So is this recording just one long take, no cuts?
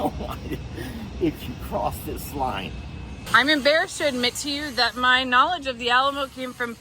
no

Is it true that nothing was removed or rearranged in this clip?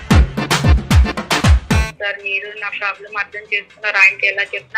no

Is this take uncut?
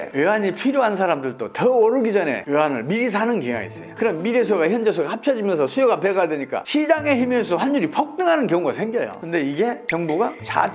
yes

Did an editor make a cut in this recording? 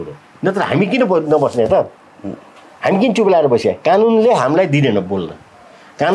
no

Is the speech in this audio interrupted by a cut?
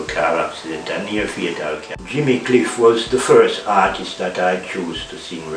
yes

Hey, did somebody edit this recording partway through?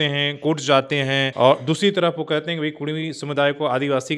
no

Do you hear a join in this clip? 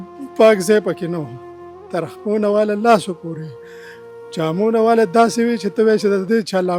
no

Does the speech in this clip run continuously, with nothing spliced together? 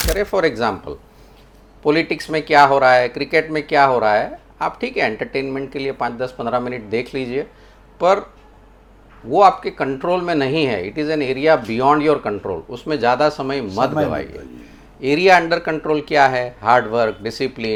yes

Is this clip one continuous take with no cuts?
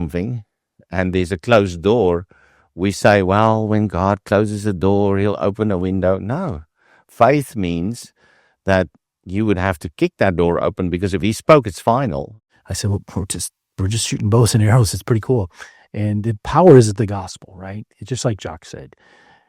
no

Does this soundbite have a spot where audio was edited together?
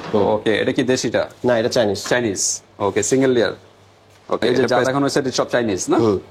yes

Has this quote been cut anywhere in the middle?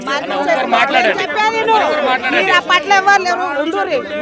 no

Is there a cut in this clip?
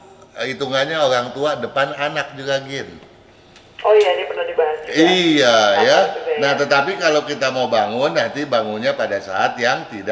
no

